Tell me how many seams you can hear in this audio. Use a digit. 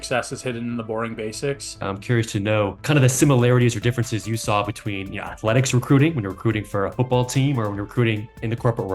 1